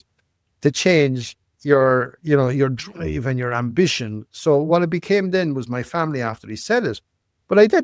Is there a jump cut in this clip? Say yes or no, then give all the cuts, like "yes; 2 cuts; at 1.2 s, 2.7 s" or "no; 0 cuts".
no; 0 cuts